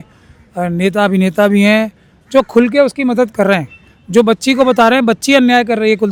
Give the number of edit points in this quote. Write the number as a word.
zero